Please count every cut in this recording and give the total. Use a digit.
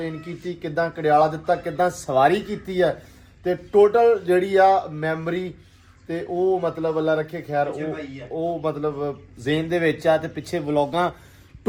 0